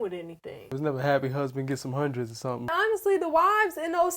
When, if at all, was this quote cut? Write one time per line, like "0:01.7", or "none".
0:00.7
0:02.7